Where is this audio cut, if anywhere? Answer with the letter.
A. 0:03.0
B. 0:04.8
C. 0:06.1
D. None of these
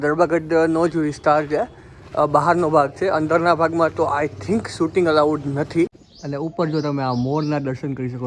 C